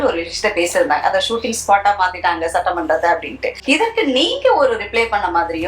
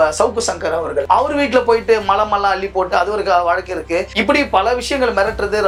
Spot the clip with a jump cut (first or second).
first